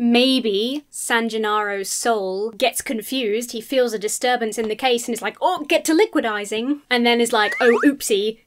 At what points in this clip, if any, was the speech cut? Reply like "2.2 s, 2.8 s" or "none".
0.9 s, 2.5 s